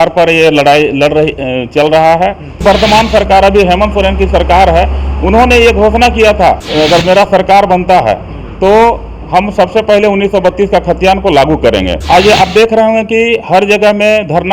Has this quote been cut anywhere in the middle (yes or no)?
yes